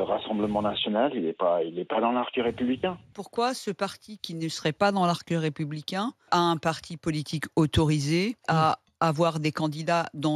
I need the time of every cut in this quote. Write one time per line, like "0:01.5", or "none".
0:03.1
0:06.3
0:08.5